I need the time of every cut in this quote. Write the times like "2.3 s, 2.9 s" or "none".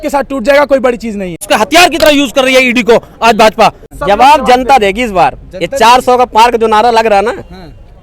1.3 s, 3.9 s